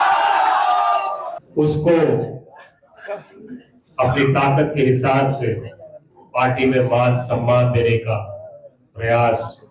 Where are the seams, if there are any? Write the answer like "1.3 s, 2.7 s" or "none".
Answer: 1.4 s